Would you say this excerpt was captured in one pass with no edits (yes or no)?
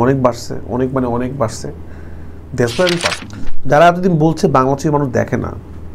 no